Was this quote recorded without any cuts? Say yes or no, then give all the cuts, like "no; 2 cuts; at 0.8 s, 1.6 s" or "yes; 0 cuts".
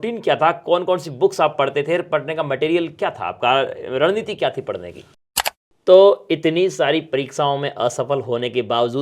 no; 1 cut; at 5.2 s